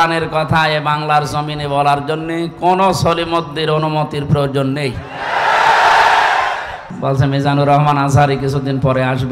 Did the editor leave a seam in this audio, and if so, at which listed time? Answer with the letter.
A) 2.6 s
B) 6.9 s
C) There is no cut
B